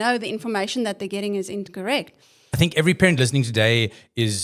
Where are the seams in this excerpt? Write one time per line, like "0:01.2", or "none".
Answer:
0:02.6